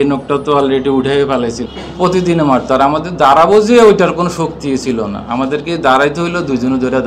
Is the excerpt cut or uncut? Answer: cut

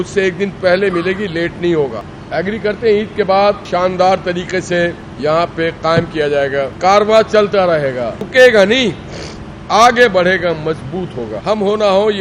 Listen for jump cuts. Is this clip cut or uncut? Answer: cut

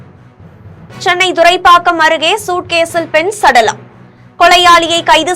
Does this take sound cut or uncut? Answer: cut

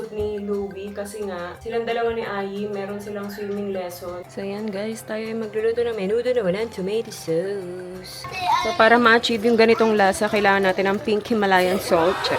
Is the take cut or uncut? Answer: cut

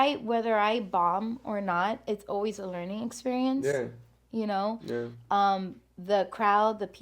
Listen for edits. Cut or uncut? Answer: uncut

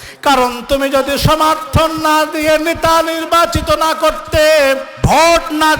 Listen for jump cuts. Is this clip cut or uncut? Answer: cut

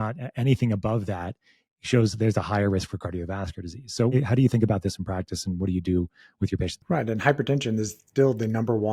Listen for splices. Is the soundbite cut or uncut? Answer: cut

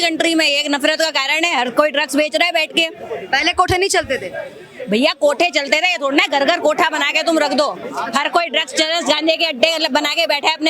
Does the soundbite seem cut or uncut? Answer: uncut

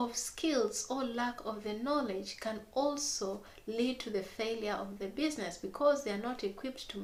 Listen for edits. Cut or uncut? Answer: uncut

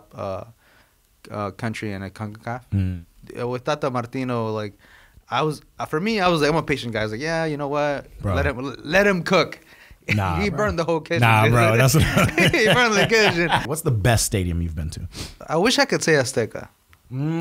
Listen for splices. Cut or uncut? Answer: cut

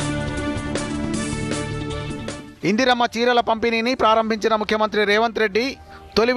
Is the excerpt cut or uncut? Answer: uncut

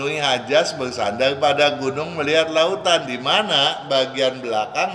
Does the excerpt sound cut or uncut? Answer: uncut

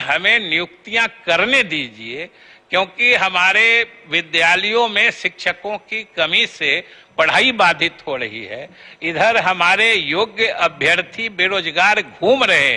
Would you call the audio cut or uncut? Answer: uncut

